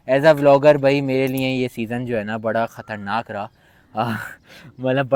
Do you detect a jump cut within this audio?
no; 0 cuts

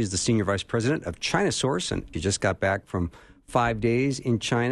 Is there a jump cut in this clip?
yes; 1 cut; at 2.1 s

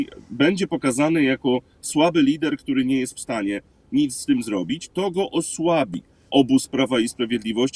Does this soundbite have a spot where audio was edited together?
yes; 1 cut; at 6.3 s

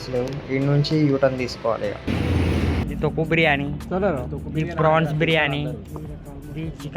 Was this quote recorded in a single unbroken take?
no; 1 cut; at 2.8 s

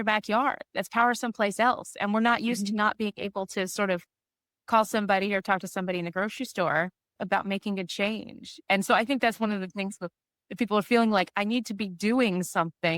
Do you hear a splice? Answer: yes; 1 cut; at 7.1 s

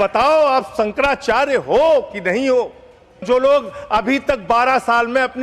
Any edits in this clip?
yes; 1 cut; at 3.2 s

